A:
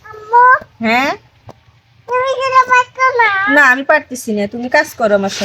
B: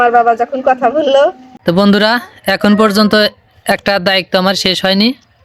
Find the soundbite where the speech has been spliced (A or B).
B